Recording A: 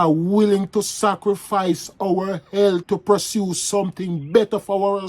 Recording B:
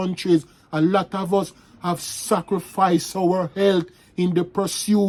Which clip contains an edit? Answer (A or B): A